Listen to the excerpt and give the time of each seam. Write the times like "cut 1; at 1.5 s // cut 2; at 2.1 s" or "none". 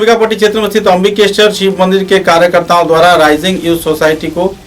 none